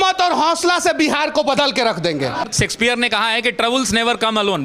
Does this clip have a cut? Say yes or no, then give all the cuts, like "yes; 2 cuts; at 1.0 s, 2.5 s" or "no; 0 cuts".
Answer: yes; 1 cut; at 2.4 s